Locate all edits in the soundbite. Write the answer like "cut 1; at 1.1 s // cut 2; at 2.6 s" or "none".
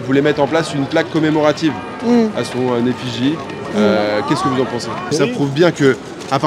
cut 1; at 5.1 s